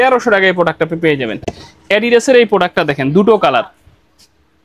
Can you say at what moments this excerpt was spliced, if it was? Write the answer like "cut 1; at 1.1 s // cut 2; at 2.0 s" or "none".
none